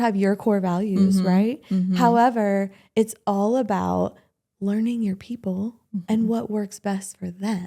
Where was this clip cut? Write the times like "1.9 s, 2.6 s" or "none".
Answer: none